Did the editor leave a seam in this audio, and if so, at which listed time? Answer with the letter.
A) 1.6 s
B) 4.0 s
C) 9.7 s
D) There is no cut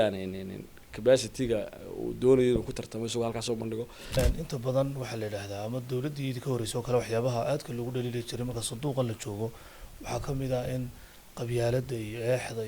B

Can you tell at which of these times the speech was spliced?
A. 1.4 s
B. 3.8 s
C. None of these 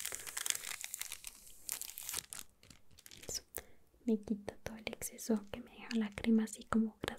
C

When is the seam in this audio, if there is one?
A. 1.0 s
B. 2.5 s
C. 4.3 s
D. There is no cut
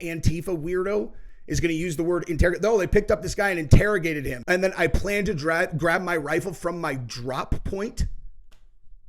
C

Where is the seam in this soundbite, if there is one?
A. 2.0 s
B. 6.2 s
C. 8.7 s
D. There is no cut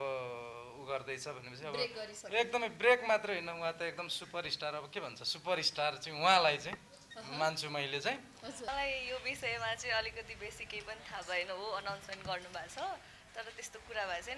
C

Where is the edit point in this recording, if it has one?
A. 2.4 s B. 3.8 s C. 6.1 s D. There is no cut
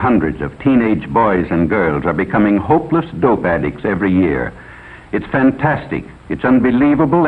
D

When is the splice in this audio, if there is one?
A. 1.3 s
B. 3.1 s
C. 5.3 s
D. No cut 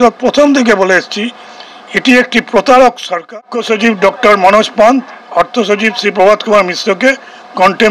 B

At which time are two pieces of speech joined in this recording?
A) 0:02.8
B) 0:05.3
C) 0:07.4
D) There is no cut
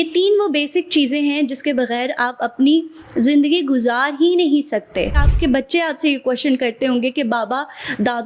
B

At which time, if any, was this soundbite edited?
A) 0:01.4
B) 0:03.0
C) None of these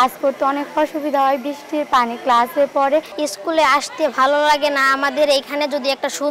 C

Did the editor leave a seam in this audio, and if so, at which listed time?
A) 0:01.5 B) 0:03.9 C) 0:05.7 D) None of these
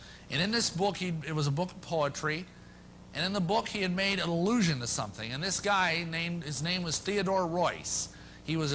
A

